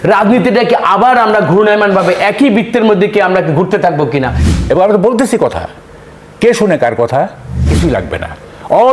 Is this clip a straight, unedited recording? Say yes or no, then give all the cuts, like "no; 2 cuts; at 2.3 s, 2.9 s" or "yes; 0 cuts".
no; 2 cuts; at 4.4 s, 7.7 s